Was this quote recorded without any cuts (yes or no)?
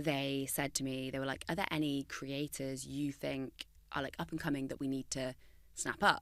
yes